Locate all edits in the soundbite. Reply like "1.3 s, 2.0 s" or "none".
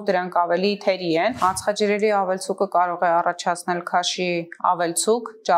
1.4 s